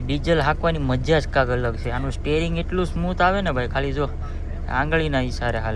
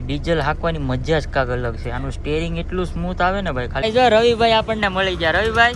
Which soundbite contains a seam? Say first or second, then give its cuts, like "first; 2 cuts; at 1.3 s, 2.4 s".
second; 1 cut; at 3.8 s